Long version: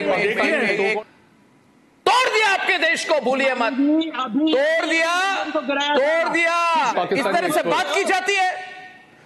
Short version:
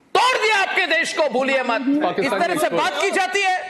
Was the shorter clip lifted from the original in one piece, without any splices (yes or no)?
no